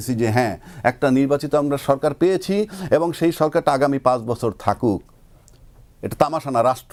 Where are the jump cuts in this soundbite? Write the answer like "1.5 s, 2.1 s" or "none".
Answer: none